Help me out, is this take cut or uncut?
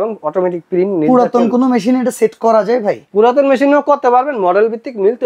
uncut